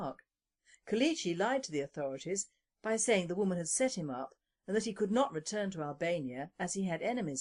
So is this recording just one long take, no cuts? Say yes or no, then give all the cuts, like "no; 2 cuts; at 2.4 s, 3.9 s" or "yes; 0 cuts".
yes; 0 cuts